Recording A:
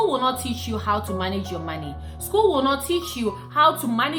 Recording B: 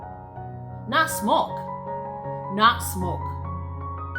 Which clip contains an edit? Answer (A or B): B